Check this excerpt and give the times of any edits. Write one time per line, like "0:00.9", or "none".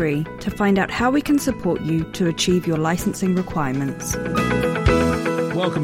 0:04.1